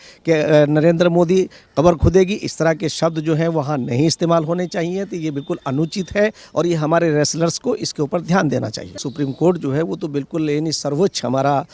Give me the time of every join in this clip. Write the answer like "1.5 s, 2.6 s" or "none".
9.1 s